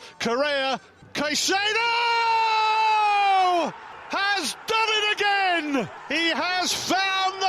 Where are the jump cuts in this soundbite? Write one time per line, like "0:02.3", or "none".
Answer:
0:01.0
0:03.9
0:06.0